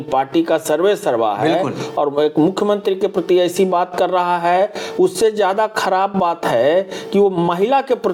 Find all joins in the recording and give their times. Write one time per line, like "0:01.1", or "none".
none